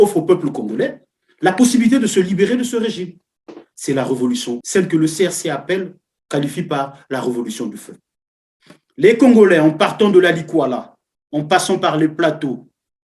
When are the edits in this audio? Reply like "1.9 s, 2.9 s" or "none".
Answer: 4.6 s

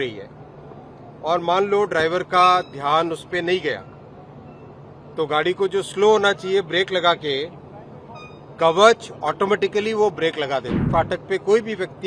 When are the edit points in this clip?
10.8 s

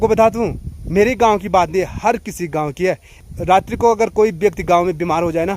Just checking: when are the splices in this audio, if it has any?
3.1 s

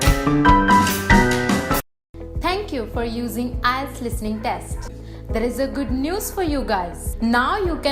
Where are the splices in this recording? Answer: 1.9 s

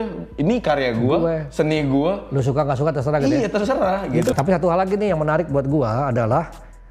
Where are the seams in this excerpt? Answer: 4.3 s

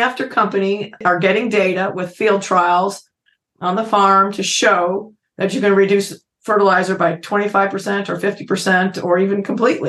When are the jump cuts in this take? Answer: 1.0 s

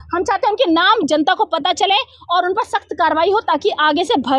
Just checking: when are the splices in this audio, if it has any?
none

